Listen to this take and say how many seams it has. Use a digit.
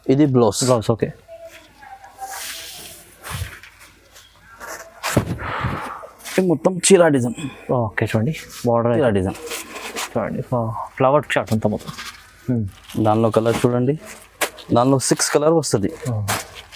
1